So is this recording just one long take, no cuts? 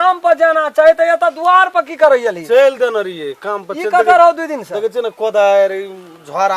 yes; 0 cuts

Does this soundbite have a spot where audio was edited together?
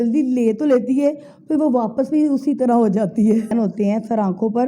yes; 1 cut; at 3.5 s

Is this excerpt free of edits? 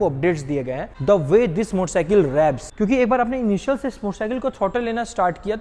no; 2 cuts; at 0.9 s, 2.7 s

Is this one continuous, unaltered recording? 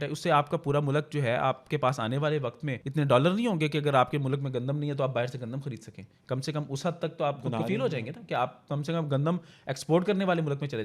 no; 1 cut; at 2.8 s

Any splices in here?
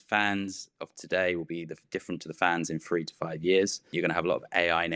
yes; 1 cut; at 3.9 s

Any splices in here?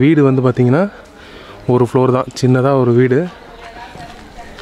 no; 0 cuts

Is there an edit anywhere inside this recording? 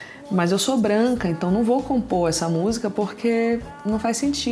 no; 0 cuts

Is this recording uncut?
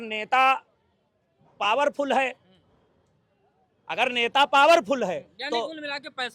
yes; 0 cuts

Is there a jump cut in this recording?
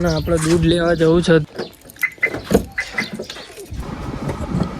yes; 2 cuts; at 1.4 s, 3.8 s

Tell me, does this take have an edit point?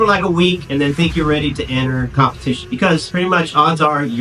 no; 0 cuts

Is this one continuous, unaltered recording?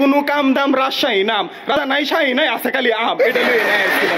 no; 1 cut; at 1.7 s

